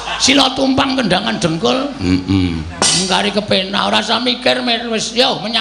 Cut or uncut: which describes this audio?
uncut